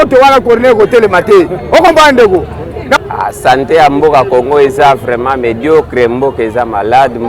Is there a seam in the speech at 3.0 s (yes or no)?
yes